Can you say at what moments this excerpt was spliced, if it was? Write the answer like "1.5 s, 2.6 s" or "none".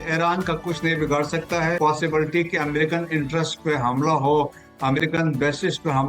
1.8 s